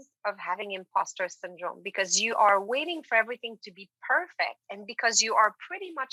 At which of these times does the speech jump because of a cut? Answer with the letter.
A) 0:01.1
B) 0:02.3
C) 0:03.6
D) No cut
D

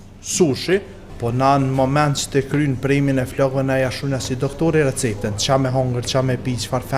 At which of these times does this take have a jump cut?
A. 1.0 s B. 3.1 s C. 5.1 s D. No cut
A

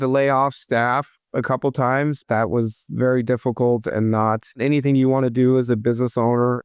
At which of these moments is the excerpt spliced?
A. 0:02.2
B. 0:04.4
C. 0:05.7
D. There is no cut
A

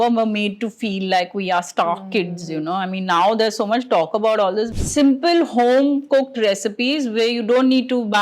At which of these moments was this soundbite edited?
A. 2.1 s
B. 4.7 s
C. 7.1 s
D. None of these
B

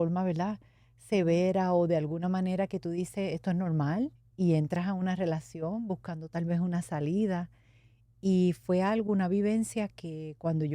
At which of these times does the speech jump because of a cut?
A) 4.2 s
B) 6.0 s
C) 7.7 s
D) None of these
A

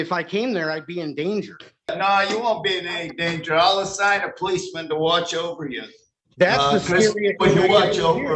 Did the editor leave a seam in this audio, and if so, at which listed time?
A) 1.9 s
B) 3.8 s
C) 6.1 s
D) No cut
A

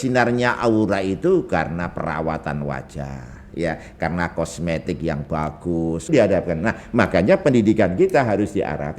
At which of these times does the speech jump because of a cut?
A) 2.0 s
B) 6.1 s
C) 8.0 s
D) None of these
B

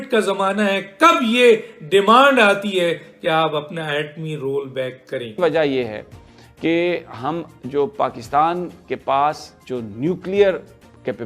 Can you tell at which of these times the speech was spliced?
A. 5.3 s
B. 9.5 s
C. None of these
A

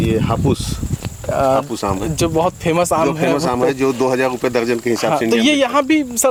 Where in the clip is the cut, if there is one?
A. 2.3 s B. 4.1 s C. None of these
C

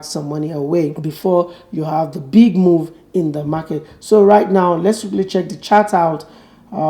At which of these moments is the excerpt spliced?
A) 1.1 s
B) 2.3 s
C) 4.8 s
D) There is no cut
A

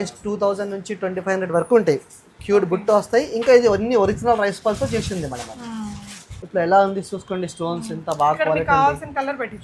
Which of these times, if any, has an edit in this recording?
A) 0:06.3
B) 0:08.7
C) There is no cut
A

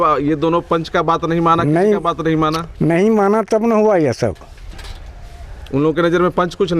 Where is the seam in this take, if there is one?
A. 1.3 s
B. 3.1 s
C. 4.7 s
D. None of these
D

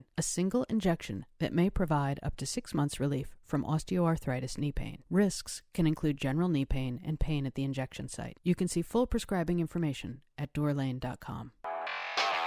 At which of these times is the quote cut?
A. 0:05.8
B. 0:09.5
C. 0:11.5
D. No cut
C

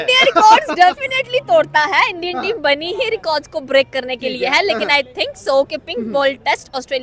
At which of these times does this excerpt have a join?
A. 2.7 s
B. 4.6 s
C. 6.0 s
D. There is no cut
D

